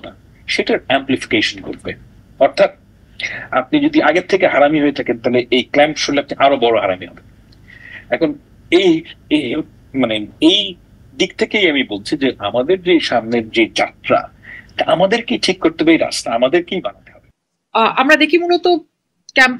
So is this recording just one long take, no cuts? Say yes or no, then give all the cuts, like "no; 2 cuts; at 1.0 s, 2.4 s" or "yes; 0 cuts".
yes; 0 cuts